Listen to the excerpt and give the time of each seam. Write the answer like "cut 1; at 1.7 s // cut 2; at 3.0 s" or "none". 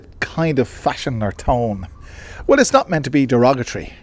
none